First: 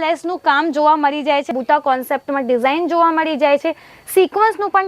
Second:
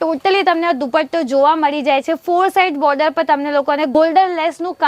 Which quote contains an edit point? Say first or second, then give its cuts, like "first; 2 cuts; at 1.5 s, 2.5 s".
first; 1 cut; at 1.5 s